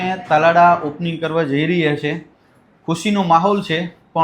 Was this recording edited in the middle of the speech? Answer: no; 0 cuts

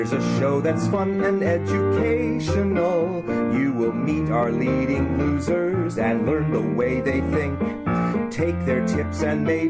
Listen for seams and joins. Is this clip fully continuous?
yes; 0 cuts

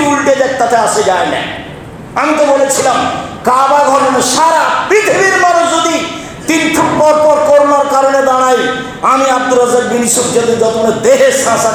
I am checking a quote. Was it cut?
no; 0 cuts

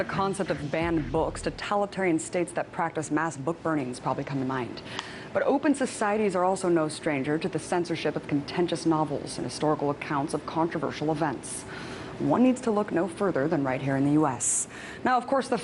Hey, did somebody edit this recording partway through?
yes; 1 cut; at 7.1 s

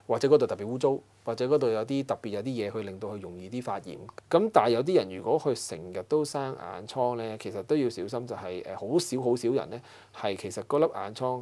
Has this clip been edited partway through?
yes; 1 cut; at 4.0 s

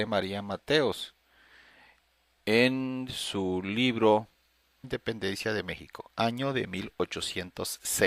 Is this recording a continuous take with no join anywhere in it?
yes; 0 cuts

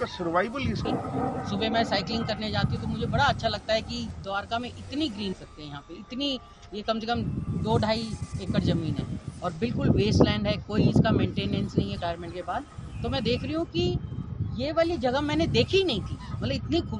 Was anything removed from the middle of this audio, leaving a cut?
yes; 3 cuts; at 0.9 s, 5.4 s, 12.0 s

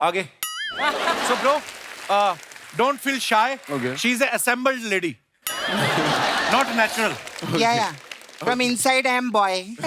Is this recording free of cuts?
no; 1 cut; at 1.3 s

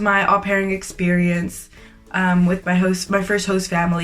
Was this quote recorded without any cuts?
yes; 0 cuts

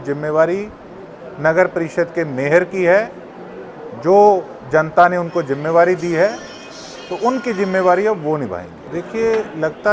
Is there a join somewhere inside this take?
yes; 1 cut; at 8.7 s

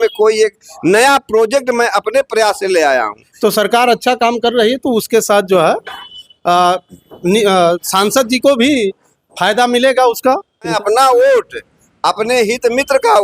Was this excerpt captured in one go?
no; 2 cuts; at 3.2 s, 10.8 s

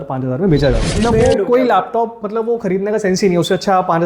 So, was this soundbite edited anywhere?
yes; 1 cut; at 1.0 s

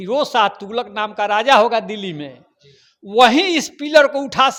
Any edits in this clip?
no; 0 cuts

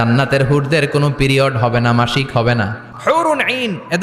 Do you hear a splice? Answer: yes; 1 cut; at 2.8 s

